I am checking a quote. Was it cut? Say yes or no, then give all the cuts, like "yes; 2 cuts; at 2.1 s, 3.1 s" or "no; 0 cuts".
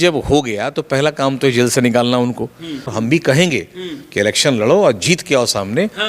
yes; 1 cut; at 2.9 s